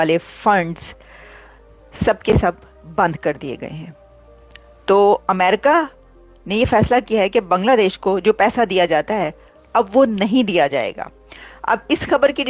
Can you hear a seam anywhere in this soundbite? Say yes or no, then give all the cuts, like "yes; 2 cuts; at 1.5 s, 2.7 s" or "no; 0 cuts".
no; 0 cuts